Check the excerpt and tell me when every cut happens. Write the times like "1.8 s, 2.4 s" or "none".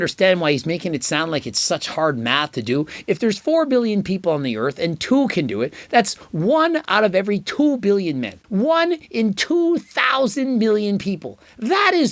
8.3 s